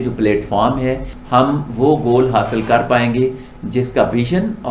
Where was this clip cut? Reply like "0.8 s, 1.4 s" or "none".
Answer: 1.1 s